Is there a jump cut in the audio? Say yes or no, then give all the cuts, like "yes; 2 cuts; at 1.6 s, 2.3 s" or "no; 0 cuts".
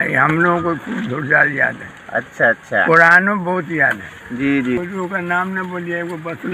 yes; 1 cut; at 4.8 s